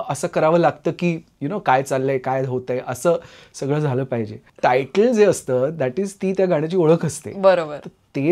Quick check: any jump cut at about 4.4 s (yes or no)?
yes